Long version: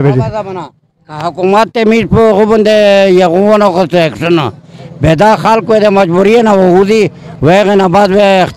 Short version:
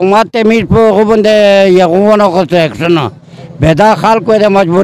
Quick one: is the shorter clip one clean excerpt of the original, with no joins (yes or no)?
yes